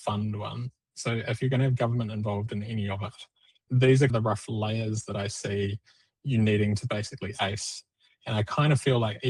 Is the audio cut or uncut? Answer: uncut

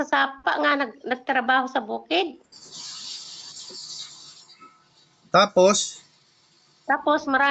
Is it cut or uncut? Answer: uncut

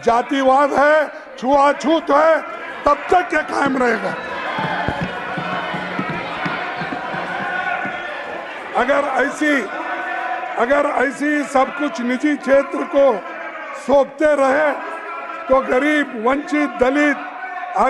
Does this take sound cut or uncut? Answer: uncut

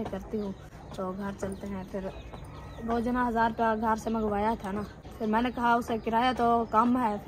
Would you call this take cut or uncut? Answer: cut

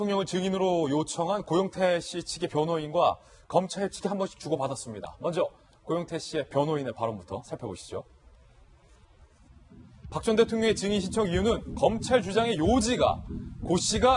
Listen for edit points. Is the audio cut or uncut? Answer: cut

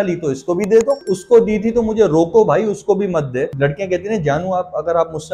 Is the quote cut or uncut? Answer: cut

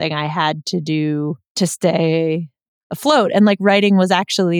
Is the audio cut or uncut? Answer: cut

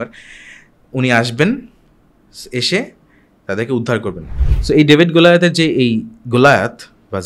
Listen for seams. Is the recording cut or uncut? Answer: cut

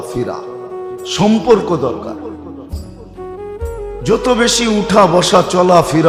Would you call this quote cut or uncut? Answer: uncut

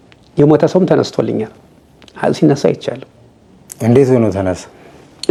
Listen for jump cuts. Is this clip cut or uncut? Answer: uncut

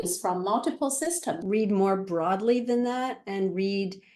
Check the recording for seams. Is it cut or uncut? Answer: cut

